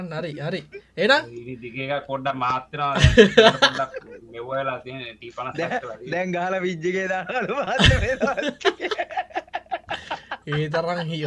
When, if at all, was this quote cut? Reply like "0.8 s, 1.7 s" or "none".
none